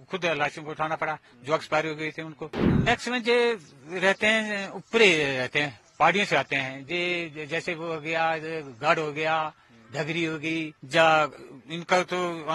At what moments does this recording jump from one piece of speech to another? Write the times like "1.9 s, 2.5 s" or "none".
2.7 s, 10.8 s